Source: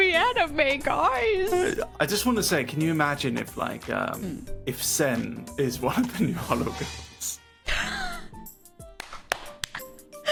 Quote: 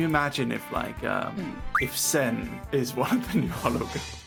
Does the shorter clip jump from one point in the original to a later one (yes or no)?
no